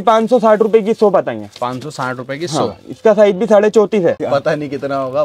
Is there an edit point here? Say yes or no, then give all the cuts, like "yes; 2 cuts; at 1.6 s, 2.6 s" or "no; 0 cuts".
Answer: yes; 1 cut; at 4.2 s